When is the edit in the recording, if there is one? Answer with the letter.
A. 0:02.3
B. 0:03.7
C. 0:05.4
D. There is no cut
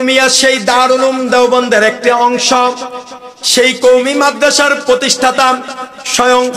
D